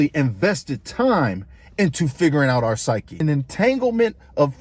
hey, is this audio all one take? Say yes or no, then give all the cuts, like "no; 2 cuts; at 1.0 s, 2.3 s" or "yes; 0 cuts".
no; 1 cut; at 3.2 s